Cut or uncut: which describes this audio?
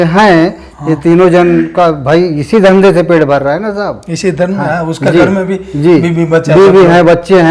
uncut